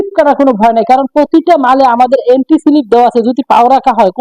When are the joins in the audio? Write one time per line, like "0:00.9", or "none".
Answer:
none